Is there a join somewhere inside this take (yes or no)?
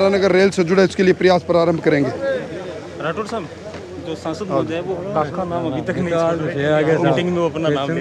no